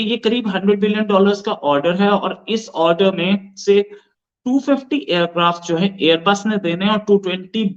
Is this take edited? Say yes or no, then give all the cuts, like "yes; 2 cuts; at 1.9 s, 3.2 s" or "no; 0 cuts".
no; 0 cuts